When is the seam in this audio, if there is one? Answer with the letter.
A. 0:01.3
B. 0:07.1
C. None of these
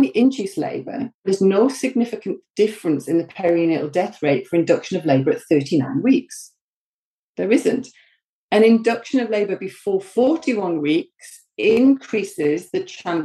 A